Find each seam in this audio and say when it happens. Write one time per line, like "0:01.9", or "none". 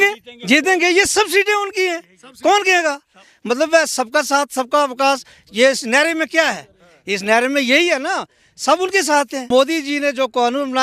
0:09.5